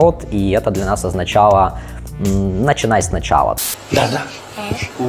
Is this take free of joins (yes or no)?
yes